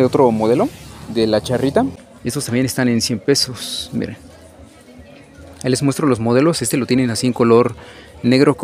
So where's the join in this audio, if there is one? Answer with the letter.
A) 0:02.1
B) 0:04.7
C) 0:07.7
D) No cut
A